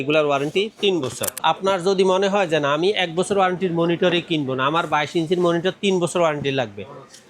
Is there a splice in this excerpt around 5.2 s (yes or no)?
no